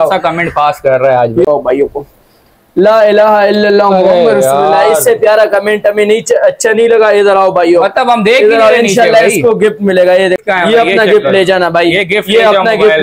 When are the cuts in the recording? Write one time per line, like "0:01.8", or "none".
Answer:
0:01.5
0:10.4